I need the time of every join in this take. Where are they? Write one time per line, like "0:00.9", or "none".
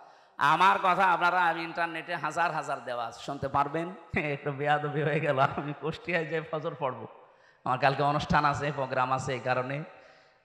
0:04.2